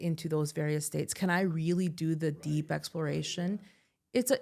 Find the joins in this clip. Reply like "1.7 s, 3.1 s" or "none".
none